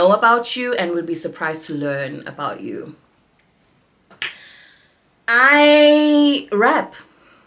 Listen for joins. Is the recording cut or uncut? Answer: uncut